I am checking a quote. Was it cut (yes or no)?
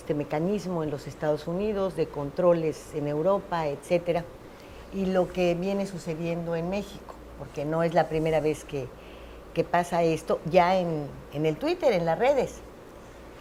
no